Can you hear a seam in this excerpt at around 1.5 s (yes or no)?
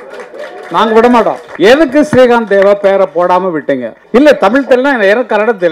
yes